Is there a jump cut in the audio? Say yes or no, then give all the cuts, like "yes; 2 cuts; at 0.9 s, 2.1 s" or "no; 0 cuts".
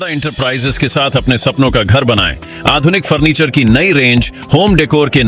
no; 0 cuts